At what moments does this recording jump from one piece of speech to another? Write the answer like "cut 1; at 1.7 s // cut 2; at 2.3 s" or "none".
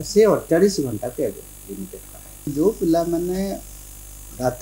cut 1; at 2.5 s